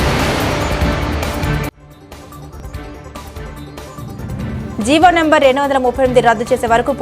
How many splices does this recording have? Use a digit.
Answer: 1